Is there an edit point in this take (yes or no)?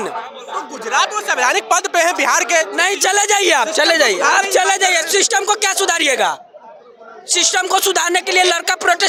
no